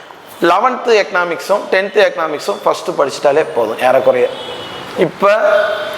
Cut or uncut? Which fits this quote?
uncut